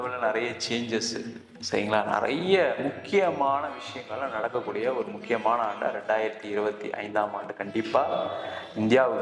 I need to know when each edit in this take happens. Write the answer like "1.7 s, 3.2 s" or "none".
none